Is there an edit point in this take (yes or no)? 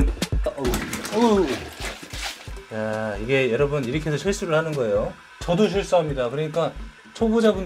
no